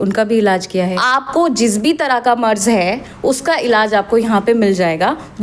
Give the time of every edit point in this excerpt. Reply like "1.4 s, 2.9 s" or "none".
0.9 s